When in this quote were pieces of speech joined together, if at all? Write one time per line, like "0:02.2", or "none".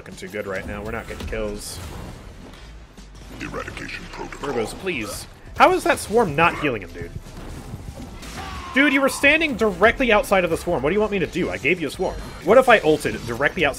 0:08.2
0:12.3